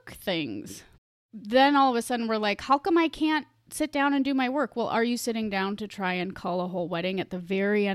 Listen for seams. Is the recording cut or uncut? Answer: uncut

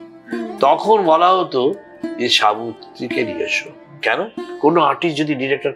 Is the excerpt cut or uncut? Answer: cut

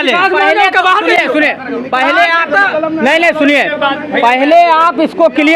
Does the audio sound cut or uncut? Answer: uncut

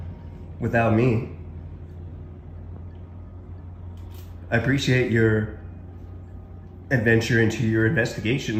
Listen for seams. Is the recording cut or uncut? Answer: uncut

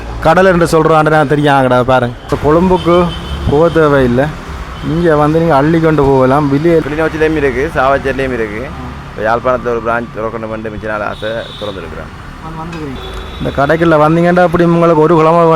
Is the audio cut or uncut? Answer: cut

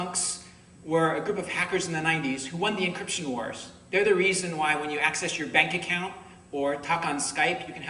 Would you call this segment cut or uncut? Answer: uncut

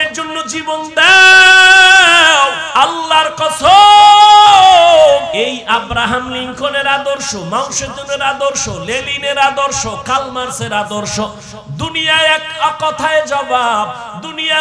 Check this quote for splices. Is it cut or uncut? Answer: cut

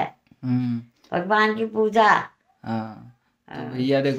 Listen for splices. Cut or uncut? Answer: uncut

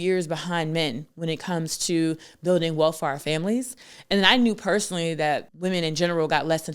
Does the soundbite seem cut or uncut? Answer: cut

